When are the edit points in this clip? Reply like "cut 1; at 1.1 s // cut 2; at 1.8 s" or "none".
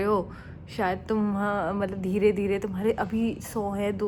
none